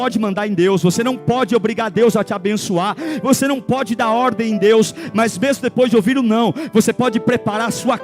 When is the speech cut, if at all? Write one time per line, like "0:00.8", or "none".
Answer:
0:00.9